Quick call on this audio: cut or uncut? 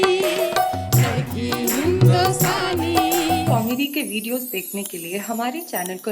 cut